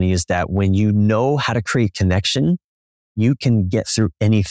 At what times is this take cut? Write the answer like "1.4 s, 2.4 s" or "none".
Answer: none